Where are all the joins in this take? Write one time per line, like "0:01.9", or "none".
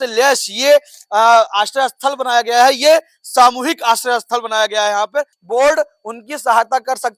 0:05.4